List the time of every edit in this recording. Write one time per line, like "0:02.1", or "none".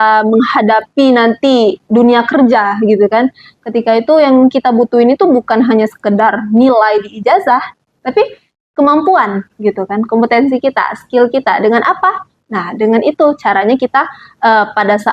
none

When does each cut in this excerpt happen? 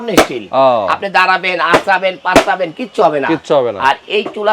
none

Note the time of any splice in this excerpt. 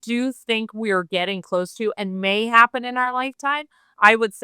none

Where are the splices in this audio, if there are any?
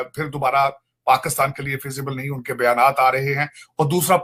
none

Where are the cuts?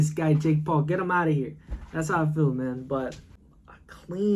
0:03.2

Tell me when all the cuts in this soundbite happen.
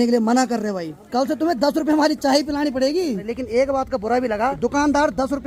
0:01.0
0:03.3
0:04.6

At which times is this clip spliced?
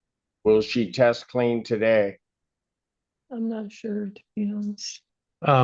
none

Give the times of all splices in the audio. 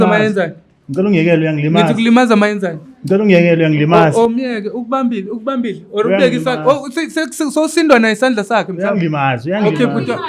none

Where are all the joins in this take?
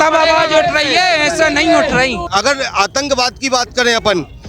0:02.2

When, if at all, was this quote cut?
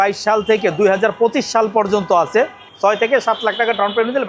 0:02.6

